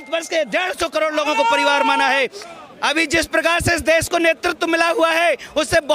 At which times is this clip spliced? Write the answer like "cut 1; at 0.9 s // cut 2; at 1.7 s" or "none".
cut 1; at 2.4 s